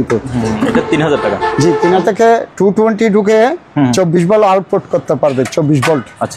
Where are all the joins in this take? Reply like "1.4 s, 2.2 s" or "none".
2.0 s